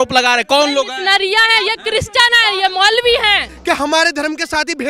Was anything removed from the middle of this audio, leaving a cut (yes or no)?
yes